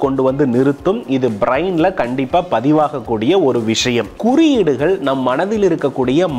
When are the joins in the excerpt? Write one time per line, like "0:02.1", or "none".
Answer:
0:04.1